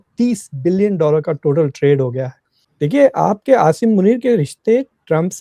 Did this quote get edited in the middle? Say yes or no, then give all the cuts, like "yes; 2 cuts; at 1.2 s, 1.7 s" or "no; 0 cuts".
yes; 1 cut; at 2.6 s